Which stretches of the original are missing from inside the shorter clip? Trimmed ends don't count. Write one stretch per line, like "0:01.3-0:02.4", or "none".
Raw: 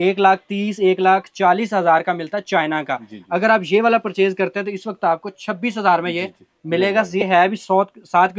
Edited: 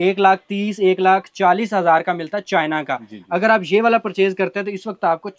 none